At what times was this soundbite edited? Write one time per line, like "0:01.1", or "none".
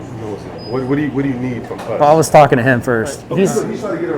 0:03.2